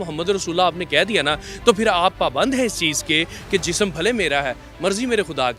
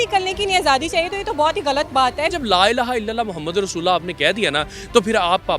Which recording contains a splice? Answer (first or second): second